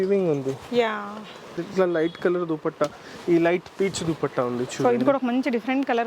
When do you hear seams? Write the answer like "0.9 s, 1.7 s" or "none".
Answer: 1.6 s